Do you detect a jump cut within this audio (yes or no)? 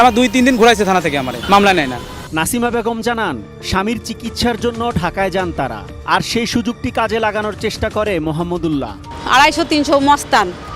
no